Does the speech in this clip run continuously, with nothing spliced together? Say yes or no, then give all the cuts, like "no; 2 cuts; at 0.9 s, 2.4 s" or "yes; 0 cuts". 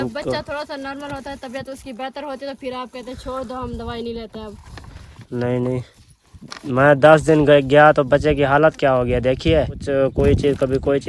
no; 1 cut; at 9.8 s